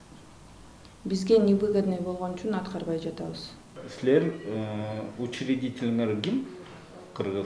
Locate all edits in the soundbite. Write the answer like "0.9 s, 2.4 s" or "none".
3.7 s

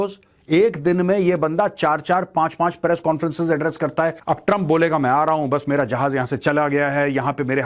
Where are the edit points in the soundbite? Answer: 4.2 s

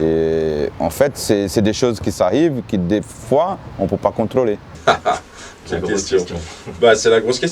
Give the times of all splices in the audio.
none

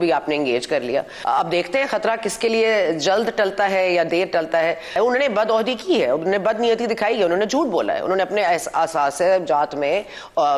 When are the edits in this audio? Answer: 1.1 s, 4.9 s

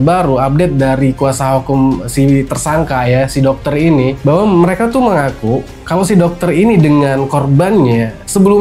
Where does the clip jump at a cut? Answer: none

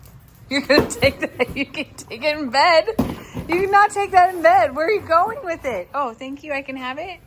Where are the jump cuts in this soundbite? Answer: none

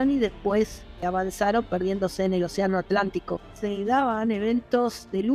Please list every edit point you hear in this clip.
1.0 s, 3.6 s

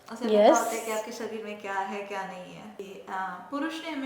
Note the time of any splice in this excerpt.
2.8 s

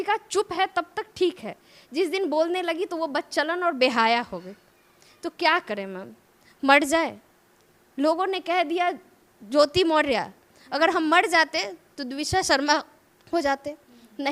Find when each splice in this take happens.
none

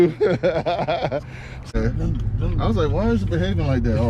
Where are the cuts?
1.7 s

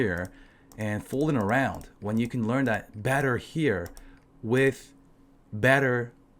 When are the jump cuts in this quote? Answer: none

